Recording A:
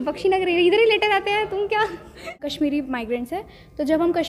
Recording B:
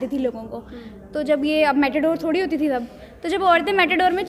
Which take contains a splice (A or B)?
A